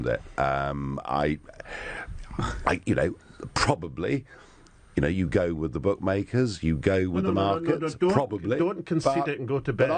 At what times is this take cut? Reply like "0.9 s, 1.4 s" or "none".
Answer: 9.0 s